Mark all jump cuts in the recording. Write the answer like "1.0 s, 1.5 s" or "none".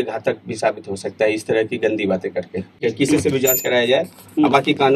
2.8 s